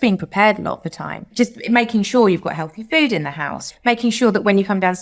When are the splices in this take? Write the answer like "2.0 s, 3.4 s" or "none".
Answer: 1.2 s, 3.7 s

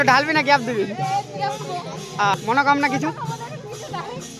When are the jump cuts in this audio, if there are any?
2.4 s

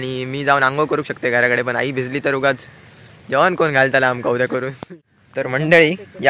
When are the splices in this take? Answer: 5.0 s

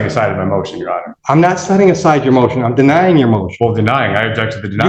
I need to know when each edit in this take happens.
1.1 s

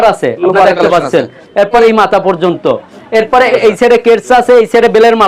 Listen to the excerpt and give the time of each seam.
1.8 s, 3.5 s

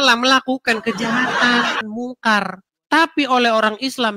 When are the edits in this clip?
1.8 s

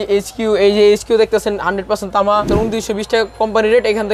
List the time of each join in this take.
2.5 s

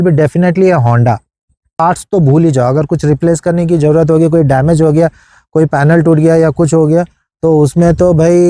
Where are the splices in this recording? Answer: 1.8 s

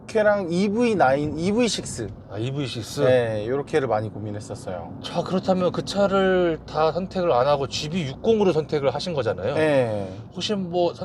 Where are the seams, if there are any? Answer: none

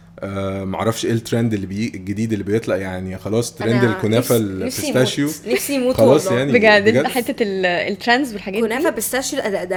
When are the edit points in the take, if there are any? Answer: none

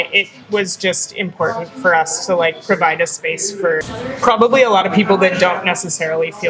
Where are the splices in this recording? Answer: 3.8 s

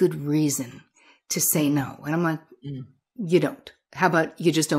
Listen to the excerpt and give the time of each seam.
none

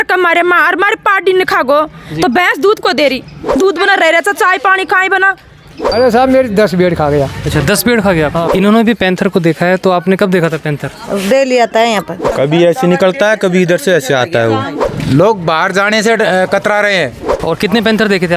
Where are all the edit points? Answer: 3.4 s, 5.7 s, 8.5 s, 12.2 s, 14.8 s, 17.3 s

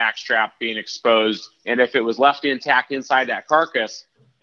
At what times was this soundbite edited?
none

